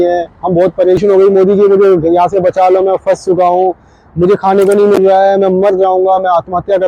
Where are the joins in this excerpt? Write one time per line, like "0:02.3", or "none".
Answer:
0:01.0